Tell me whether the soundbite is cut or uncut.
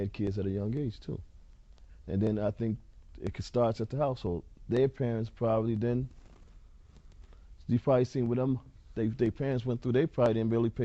uncut